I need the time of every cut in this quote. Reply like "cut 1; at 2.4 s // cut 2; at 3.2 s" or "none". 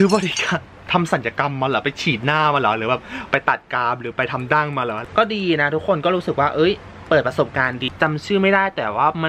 cut 1; at 0.8 s // cut 2; at 5.2 s // cut 3; at 8.0 s